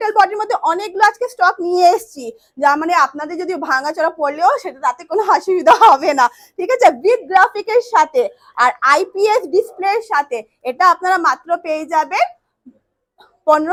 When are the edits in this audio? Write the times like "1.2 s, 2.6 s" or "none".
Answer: none